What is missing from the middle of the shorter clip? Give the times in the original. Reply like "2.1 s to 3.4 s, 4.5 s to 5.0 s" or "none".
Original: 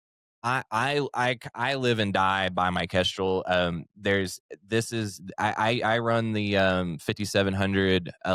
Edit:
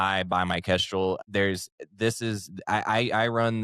3.4 s to 3.9 s